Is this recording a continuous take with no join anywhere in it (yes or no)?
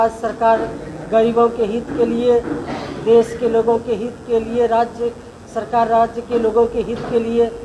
yes